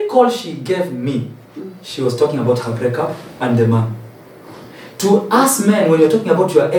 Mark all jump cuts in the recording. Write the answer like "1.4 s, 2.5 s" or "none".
none